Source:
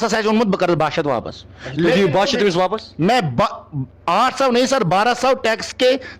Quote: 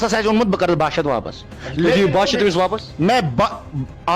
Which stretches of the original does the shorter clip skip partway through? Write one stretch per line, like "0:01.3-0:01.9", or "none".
none